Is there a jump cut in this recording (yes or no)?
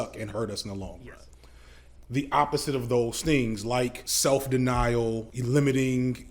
yes